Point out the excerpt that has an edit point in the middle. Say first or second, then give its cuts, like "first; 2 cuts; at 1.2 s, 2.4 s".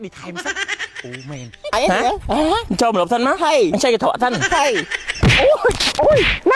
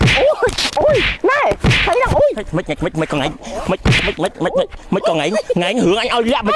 first; 1 cut; at 1.7 s